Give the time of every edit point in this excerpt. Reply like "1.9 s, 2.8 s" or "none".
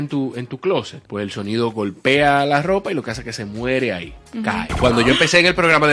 1.0 s, 4.7 s